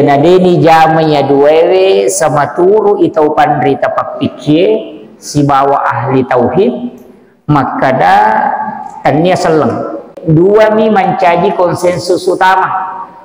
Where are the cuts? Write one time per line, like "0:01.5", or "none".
0:10.2

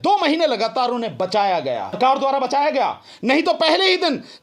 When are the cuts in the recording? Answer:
0:02.0

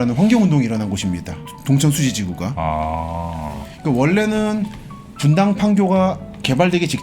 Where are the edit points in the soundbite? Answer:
0:01.5

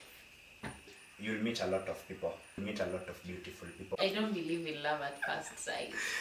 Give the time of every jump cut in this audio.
0:01.0
0:02.6
0:04.0

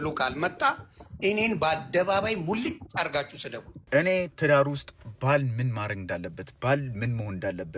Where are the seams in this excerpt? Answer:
0:03.7

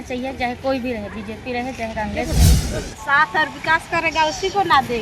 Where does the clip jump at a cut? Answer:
0:02.6

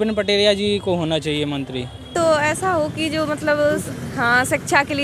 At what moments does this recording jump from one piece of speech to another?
0:02.0

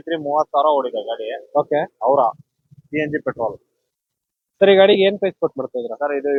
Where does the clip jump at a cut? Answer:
none

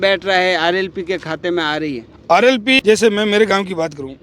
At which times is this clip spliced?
0:02.8

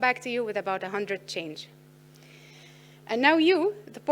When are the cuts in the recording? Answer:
none

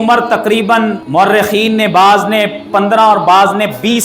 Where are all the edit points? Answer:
0:01.0

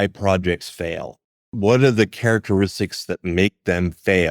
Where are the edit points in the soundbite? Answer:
0:01.4

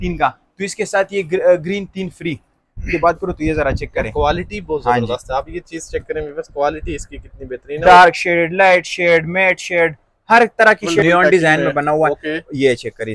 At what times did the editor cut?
0:02.9
0:07.8
0:11.0

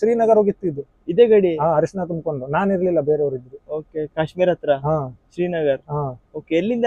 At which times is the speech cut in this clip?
none

